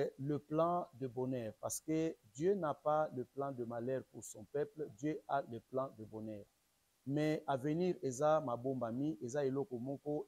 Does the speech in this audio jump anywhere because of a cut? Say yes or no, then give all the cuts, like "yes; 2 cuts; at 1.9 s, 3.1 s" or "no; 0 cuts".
yes; 1 cut; at 6.5 s